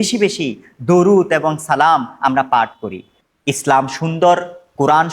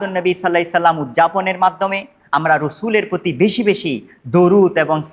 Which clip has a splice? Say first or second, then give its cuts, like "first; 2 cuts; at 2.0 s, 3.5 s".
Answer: first; 1 cut; at 3.2 s